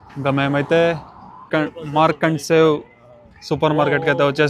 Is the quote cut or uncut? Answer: cut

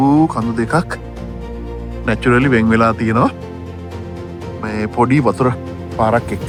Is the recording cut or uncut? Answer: uncut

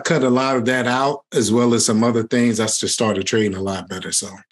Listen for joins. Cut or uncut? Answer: uncut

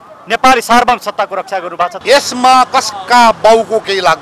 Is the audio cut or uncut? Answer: cut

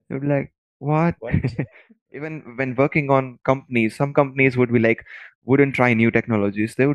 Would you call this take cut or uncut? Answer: cut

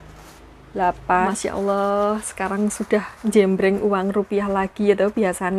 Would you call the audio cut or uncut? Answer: cut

